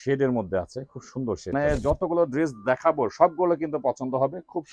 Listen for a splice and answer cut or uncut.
cut